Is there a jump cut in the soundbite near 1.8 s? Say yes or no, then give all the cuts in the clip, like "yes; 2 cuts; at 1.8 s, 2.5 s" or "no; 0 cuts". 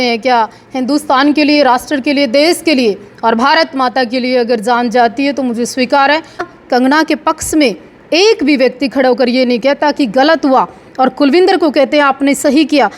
no; 1 cut; at 6.5 s